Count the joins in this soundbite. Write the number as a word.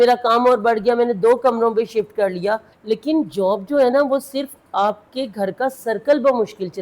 one